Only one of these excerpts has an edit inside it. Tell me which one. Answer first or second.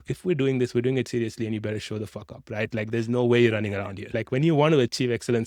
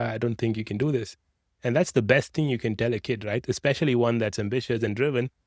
first